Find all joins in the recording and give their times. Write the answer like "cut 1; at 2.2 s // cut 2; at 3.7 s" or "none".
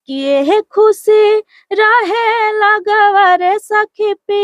none